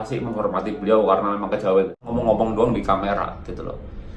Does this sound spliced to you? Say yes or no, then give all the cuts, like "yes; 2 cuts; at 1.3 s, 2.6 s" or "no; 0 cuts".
yes; 1 cut; at 2.1 s